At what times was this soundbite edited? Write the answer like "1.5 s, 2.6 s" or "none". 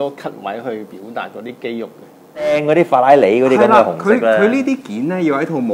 2.5 s